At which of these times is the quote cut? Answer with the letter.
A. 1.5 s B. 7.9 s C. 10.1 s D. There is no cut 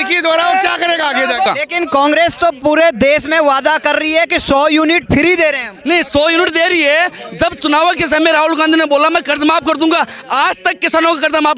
A